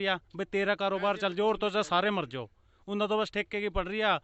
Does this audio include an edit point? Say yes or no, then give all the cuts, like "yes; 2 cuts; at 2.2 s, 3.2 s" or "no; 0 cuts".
no; 0 cuts